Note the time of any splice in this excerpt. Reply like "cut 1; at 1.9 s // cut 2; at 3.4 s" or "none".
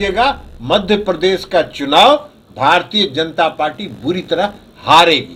none